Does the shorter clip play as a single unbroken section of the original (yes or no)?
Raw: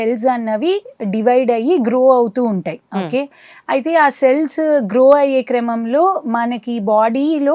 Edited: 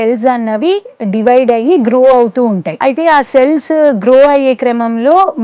no